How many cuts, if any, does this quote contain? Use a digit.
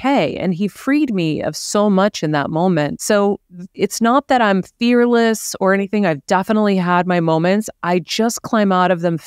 1